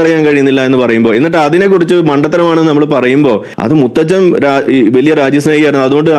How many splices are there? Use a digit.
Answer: 1